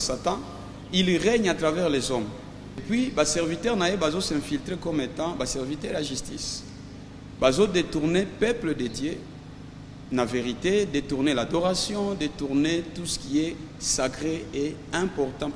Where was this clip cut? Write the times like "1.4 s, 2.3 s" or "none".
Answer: 2.8 s